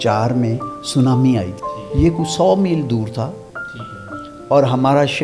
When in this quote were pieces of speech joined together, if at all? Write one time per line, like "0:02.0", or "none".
0:01.6

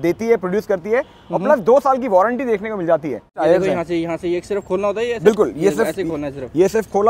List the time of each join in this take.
0:03.3

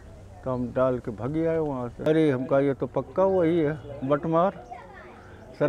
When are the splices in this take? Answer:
0:02.0

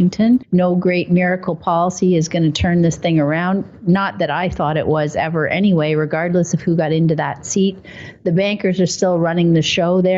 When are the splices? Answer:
0:06.2

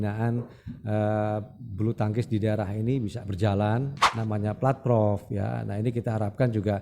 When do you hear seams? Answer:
0:04.0

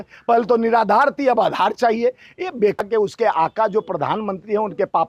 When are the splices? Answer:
0:02.8

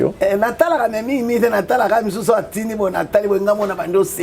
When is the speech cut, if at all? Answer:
none

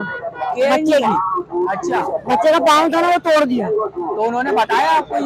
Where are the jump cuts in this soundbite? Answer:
none

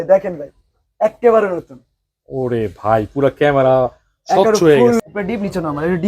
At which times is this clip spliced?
0:05.0

